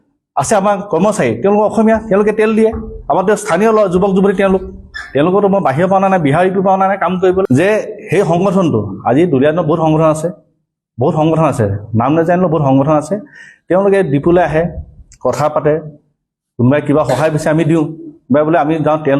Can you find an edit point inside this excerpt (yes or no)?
yes